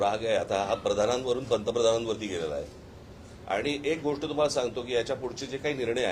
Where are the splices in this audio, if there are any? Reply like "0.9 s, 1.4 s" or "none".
none